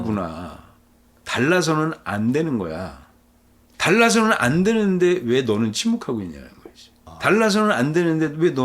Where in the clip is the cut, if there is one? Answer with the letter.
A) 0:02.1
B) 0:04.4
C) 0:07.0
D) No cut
D